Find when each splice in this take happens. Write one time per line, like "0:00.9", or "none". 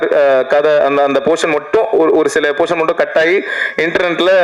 none